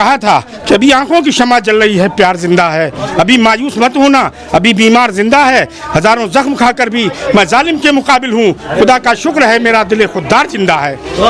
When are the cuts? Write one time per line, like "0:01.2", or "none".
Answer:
none